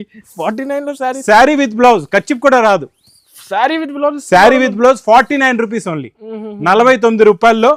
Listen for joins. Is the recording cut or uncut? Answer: uncut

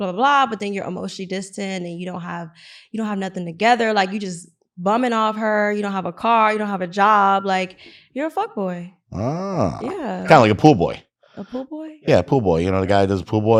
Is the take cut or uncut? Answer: uncut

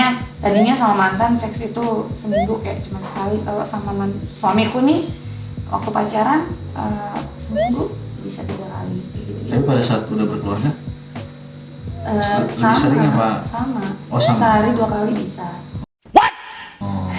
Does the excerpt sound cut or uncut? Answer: uncut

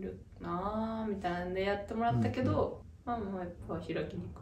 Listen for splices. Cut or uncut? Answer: cut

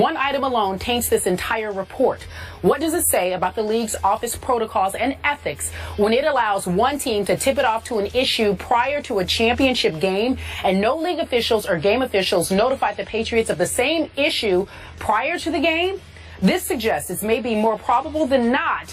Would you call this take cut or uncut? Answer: cut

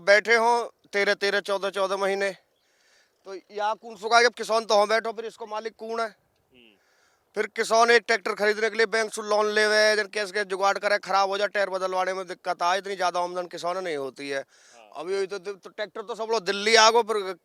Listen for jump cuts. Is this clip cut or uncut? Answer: uncut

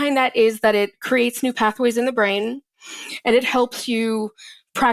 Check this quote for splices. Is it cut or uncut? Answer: uncut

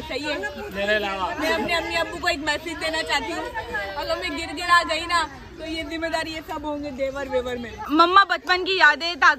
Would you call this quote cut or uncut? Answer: cut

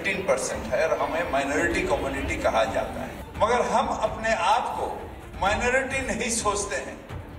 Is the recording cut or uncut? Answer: uncut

